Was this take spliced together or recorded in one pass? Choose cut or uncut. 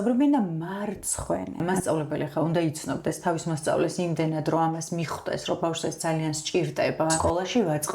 cut